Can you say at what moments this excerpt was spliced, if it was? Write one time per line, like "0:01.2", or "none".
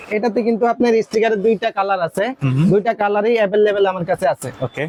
none